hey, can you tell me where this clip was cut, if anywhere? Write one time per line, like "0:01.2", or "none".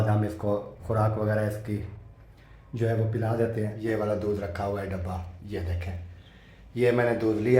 0:03.7